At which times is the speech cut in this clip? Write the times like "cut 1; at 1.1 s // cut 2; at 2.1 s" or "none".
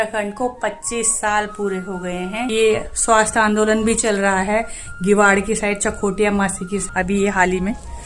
cut 1; at 2.5 s // cut 2; at 6.8 s